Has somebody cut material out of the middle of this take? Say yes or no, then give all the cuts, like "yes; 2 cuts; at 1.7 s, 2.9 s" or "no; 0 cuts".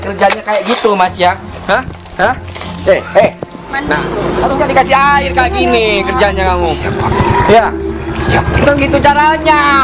no; 0 cuts